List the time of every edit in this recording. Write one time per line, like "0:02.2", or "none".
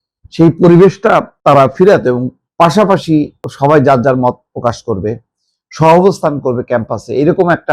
0:01.3
0:02.4
0:03.4